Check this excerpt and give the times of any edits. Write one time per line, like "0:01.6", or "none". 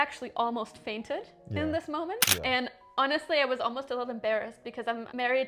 0:02.2